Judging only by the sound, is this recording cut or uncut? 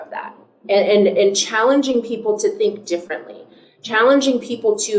uncut